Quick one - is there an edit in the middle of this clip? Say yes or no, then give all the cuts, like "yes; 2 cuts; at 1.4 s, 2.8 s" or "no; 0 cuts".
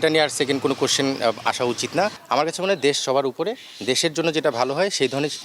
yes; 1 cut; at 2.2 s